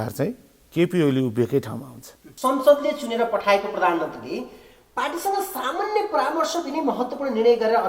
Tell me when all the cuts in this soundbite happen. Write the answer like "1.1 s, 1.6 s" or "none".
2.3 s